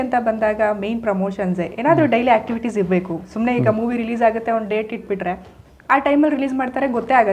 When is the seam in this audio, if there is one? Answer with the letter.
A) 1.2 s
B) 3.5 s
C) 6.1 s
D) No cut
D